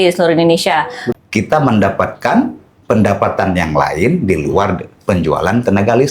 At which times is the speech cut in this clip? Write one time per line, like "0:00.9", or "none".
0:01.0